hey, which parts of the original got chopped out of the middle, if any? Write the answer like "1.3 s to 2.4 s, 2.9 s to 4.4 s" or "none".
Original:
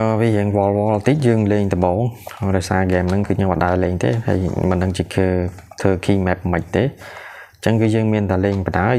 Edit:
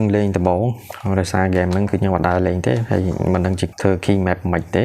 5.0 s to 5.7 s